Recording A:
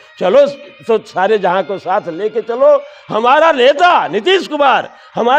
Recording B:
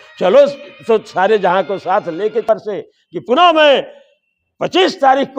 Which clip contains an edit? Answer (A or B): B